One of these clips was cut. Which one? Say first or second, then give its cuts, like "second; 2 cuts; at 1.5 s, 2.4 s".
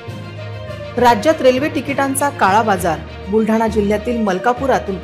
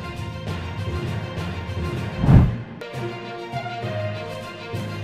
second; 1 cut; at 2.0 s